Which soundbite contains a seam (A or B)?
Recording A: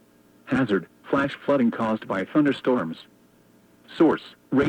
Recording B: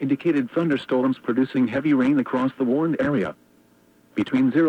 A